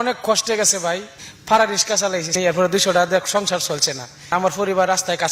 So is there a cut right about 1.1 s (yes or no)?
yes